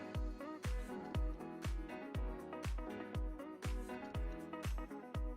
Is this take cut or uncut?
cut